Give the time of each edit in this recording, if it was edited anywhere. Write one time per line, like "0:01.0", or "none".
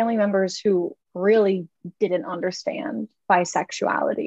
0:01.0